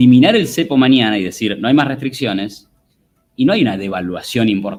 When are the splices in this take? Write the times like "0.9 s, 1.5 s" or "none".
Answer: none